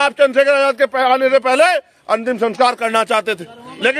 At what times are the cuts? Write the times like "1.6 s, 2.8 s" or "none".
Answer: none